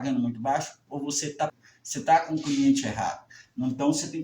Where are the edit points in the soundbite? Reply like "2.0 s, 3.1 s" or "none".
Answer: 1.2 s